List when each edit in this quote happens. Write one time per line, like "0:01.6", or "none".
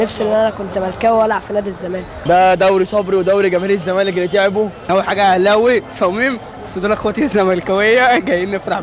0:02.1
0:04.8